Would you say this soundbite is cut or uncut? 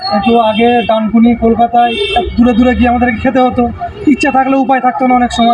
uncut